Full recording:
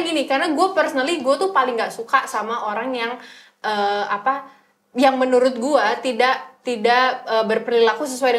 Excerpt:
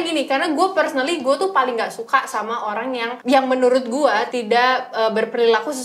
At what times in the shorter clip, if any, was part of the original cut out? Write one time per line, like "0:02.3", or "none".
0:03.1
0:04.3